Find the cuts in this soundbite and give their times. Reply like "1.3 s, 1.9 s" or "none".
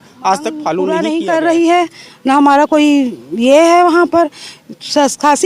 0.9 s